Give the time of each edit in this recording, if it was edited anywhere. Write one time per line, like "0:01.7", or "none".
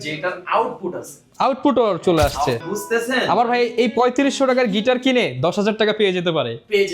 0:02.6